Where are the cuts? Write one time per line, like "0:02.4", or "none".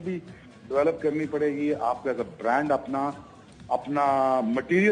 none